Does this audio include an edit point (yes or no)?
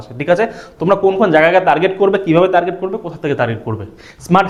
no